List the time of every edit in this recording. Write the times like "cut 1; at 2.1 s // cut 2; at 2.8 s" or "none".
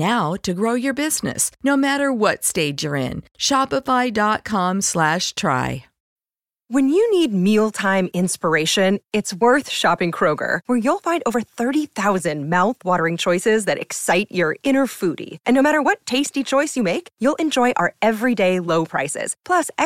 cut 1; at 6.0 s